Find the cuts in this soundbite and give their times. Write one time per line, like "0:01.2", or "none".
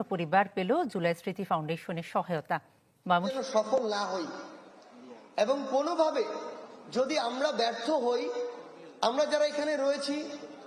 0:03.3